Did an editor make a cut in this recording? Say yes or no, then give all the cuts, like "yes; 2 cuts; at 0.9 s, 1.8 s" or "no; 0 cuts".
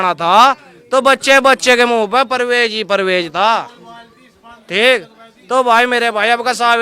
no; 0 cuts